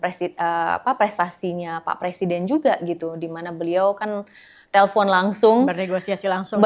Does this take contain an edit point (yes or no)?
no